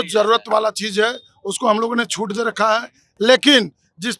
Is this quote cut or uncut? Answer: uncut